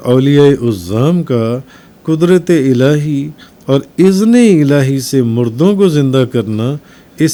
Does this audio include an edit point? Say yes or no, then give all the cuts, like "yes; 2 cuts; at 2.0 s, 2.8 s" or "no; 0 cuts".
no; 0 cuts